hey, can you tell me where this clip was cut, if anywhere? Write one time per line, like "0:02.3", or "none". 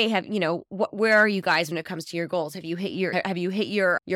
none

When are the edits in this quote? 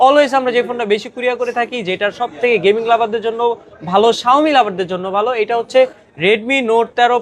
none

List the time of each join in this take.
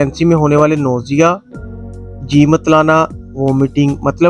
none

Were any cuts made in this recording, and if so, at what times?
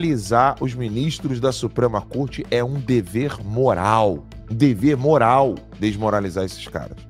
none

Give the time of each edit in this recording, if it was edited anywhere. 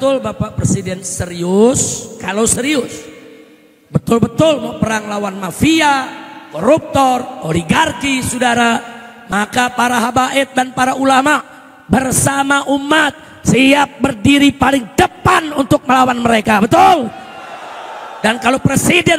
none

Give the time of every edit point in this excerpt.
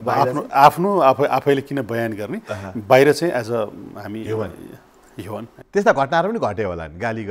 0:05.6

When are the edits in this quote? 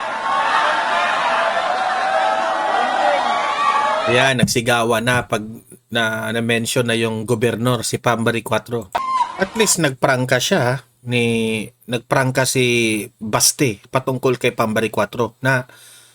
0:09.0

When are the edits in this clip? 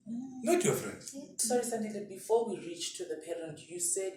0:01.3

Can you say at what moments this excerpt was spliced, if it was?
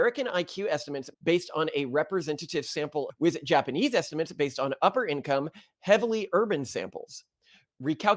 0:03.1

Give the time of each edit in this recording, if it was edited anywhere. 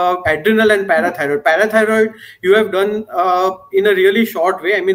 none

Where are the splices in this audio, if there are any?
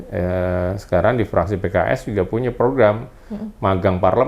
none

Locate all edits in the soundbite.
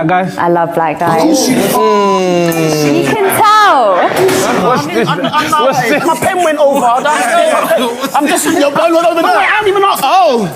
none

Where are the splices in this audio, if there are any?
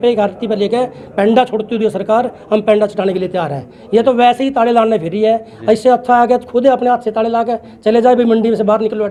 none

